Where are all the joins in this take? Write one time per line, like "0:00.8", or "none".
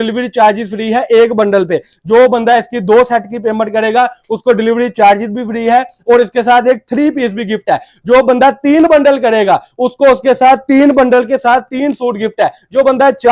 none